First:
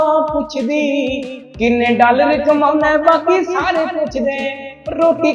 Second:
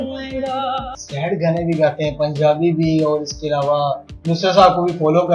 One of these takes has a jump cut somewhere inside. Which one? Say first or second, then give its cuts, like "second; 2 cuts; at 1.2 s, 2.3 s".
second; 2 cuts; at 1.0 s, 4.1 s